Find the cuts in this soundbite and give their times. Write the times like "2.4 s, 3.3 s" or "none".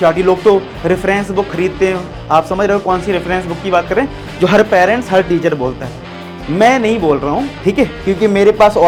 none